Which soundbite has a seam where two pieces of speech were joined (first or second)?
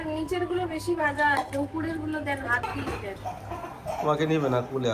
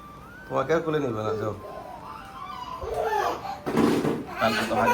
first